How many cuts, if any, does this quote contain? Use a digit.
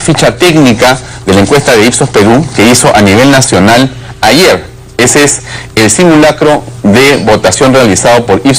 1